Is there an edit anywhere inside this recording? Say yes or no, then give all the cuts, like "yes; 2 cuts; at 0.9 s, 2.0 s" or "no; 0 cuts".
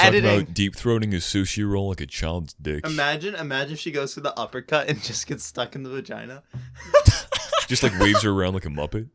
yes; 2 cuts; at 2.8 s, 7.7 s